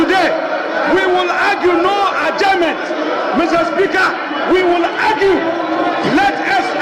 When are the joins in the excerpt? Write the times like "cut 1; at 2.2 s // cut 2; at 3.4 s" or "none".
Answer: none